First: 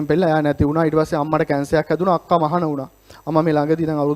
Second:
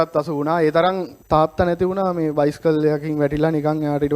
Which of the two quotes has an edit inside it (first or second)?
second